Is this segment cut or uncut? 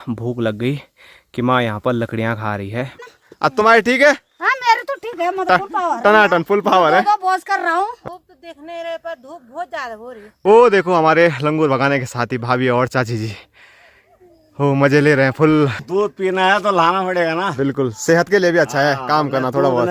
cut